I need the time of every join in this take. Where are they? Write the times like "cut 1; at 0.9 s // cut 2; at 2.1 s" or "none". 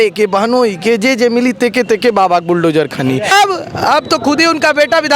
cut 1; at 3.3 s